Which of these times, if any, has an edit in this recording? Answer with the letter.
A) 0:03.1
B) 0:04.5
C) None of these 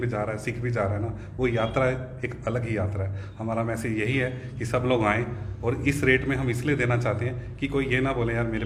C